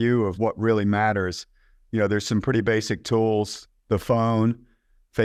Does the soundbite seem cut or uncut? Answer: uncut